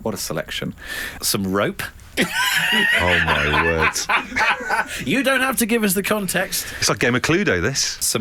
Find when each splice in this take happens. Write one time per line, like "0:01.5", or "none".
none